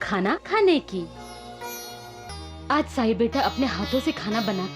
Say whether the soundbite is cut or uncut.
cut